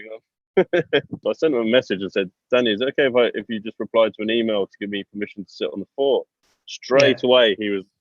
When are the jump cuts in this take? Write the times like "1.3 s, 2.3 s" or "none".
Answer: 1.1 s